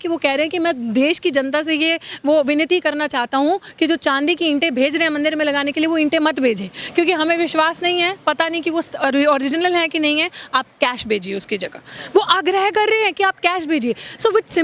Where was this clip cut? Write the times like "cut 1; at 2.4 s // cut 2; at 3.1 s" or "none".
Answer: none

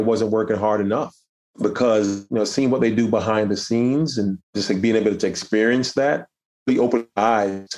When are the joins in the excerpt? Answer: cut 1; at 1.2 s // cut 2; at 4.5 s

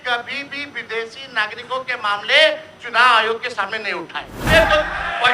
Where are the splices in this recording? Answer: cut 1; at 4.5 s

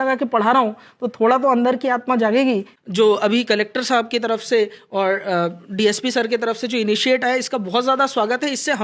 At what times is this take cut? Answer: cut 1; at 2.7 s

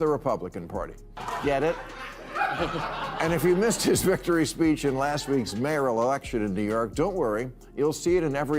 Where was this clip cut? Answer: cut 1; at 1.0 s

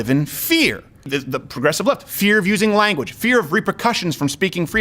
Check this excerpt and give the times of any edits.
cut 1; at 1.1 s

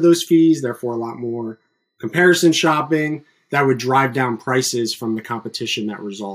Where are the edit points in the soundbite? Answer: none

